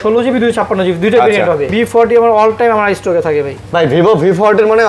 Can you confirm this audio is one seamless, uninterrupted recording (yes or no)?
no